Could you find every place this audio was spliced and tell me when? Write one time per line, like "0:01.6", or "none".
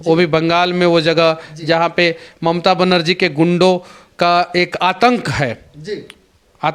none